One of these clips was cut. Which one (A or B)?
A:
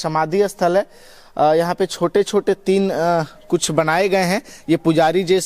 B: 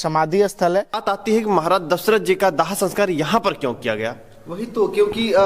B